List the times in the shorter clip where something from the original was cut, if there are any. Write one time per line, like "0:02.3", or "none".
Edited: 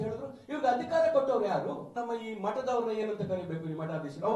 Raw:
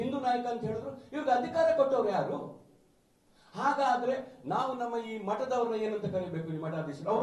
0:01.9